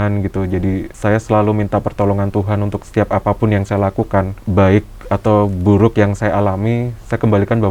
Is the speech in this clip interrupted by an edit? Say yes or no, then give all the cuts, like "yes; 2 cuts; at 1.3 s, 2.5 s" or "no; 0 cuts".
yes; 3 cuts; at 0.9 s, 2.8 s, 4.4 s